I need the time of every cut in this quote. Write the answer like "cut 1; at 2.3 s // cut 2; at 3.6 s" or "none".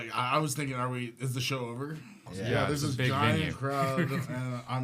cut 1; at 2.2 s